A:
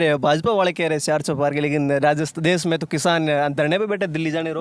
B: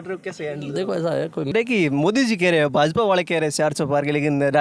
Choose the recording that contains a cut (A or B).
B